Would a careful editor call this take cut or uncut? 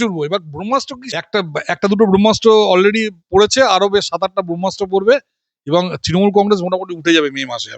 cut